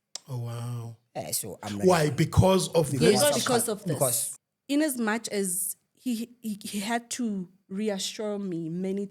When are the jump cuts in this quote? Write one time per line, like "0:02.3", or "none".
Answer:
0:04.3